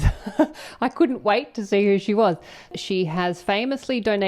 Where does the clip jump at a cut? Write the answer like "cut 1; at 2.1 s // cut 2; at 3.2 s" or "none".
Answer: cut 1; at 2.6 s